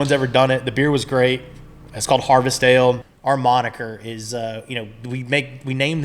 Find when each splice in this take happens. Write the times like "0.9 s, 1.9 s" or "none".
3.0 s